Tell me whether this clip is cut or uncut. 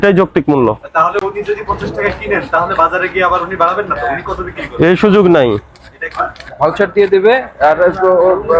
uncut